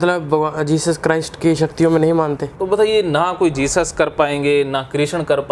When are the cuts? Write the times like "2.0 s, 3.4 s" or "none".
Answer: 2.5 s

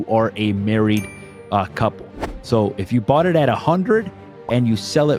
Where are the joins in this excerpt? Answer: none

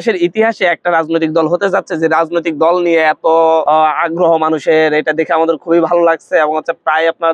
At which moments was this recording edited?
3.6 s

